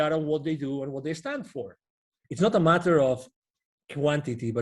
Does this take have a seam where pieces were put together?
yes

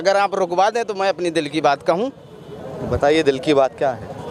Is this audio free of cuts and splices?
yes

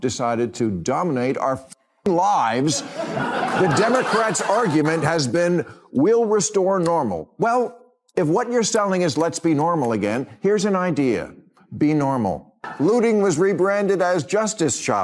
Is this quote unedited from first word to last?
no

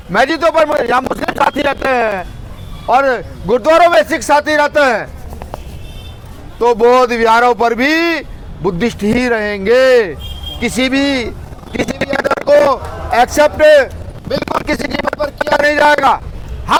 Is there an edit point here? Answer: no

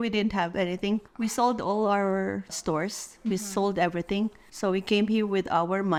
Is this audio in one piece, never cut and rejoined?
yes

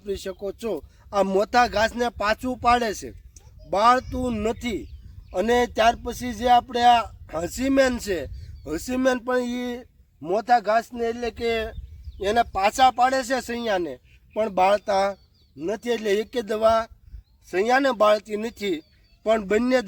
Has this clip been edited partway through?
no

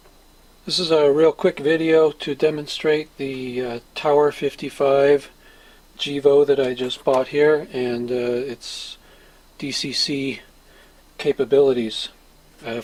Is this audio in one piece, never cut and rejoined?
yes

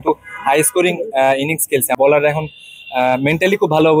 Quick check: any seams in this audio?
yes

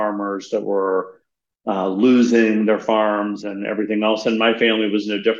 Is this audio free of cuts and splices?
yes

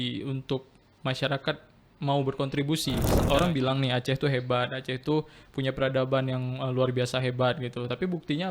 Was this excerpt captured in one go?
no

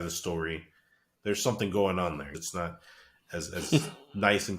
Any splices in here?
yes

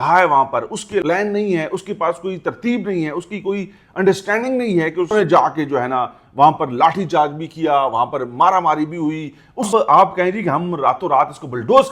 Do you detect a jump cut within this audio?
yes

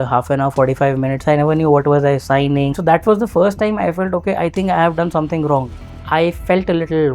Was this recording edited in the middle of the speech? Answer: yes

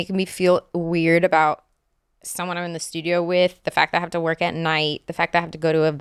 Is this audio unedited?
yes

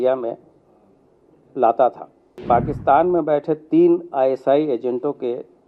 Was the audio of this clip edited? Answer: yes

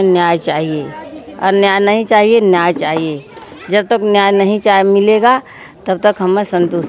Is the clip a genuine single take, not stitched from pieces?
yes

